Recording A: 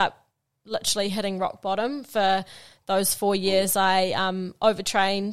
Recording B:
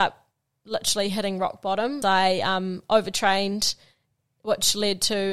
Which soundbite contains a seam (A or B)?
B